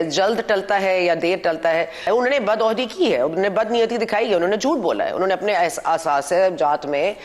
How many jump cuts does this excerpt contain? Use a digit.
1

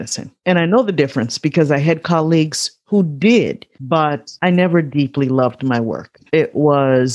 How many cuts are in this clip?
1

